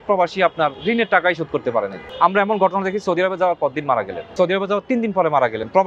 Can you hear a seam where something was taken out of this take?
yes; 2 cuts; at 2.0 s, 4.2 s

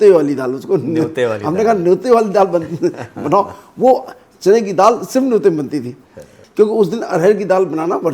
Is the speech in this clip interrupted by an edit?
no; 0 cuts

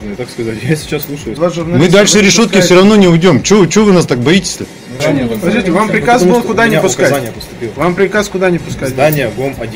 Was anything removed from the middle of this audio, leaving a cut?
yes; 2 cuts; at 1.3 s, 5.0 s

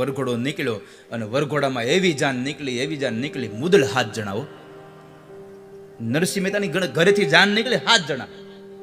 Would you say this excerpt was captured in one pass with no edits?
yes; 0 cuts

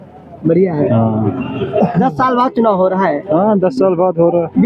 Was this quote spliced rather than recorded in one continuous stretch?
no; 0 cuts

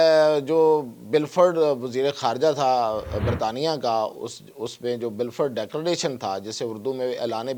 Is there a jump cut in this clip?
no; 0 cuts

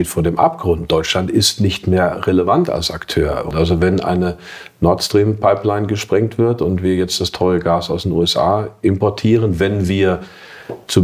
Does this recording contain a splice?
yes; 1 cut; at 3.5 s

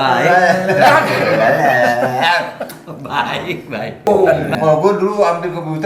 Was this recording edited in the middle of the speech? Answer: yes; 1 cut; at 4.1 s

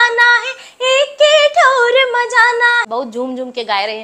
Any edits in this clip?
yes; 1 cut; at 2.9 s

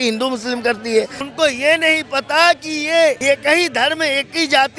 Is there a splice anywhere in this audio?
yes; 2 cuts; at 1.2 s, 3.2 s

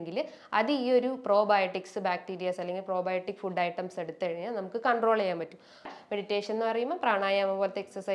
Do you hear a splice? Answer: yes; 1 cut; at 5.9 s

